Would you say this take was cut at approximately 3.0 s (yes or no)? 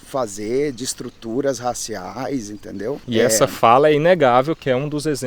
yes